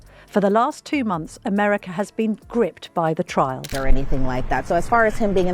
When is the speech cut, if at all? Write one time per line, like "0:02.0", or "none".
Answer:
0:03.6